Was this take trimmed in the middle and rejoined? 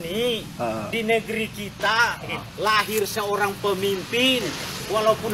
no; 0 cuts

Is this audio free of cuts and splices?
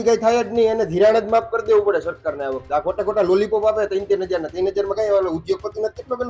yes; 0 cuts

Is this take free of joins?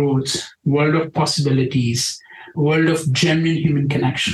yes; 0 cuts

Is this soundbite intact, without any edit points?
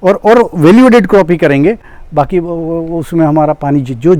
yes; 0 cuts

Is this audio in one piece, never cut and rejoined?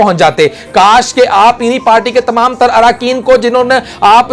yes; 0 cuts

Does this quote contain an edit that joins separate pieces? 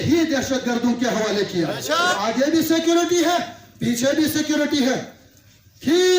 yes; 1 cut; at 2.1 s

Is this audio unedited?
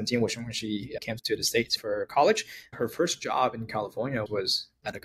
no; 3 cuts; at 1.6 s, 2.7 s, 4.3 s

